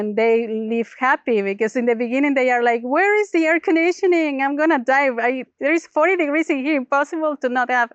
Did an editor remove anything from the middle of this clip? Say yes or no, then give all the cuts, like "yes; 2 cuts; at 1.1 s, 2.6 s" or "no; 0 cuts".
no; 0 cuts